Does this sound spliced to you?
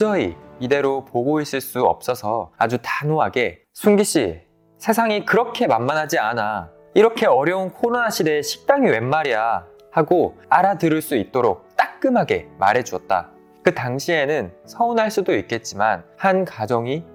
no; 0 cuts

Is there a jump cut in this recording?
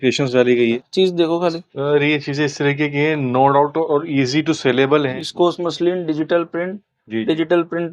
yes; 2 cuts; at 0.8 s, 5.1 s

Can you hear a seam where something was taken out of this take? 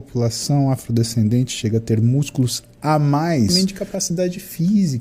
yes; 1 cut; at 3.5 s

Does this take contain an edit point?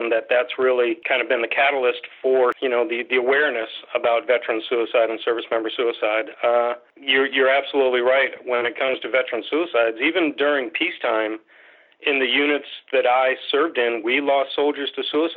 yes; 3 cuts; at 1.0 s, 2.6 s, 6.9 s

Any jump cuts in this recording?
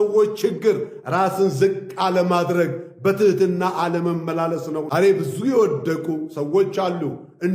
yes; 1 cut; at 4.9 s

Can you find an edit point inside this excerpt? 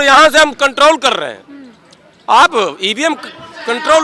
no; 0 cuts

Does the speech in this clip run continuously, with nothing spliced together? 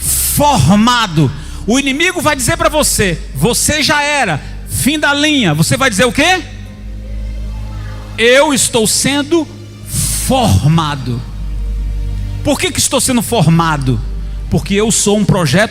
yes; 0 cuts

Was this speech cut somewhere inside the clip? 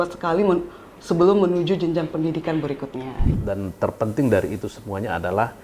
yes; 1 cut; at 3.2 s

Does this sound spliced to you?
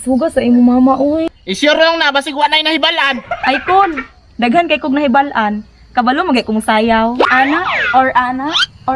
yes; 2 cuts; at 1.3 s, 7.3 s

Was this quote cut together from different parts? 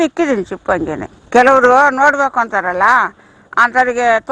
no; 0 cuts

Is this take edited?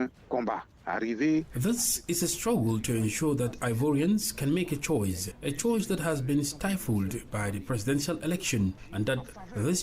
yes; 2 cuts; at 5.3 s, 8.8 s

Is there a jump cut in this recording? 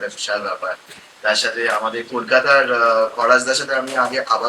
no; 0 cuts

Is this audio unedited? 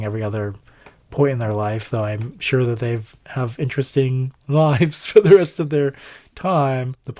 yes; 0 cuts

